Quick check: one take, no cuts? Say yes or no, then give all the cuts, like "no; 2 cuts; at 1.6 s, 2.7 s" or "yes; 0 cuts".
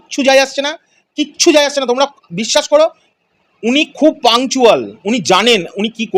yes; 0 cuts